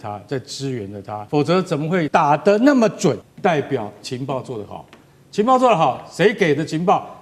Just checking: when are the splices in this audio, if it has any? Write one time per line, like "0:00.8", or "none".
0:01.2
0:02.1
0:03.3